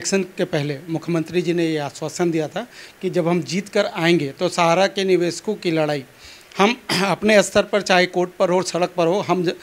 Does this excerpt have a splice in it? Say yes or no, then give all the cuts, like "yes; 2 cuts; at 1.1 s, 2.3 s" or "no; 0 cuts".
no; 0 cuts